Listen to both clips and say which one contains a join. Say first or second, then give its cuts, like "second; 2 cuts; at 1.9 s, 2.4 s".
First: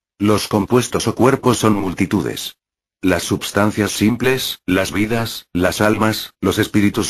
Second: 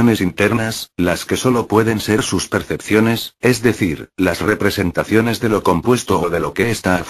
first; 1 cut; at 5.4 s